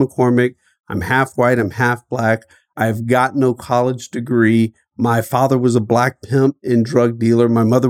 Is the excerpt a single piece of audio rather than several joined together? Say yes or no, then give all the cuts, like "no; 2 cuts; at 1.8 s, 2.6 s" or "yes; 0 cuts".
yes; 0 cuts